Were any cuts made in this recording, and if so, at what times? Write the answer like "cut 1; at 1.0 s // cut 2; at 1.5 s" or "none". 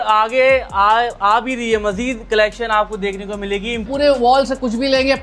cut 1; at 3.9 s